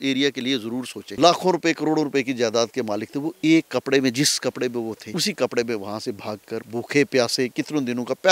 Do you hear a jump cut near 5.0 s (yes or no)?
yes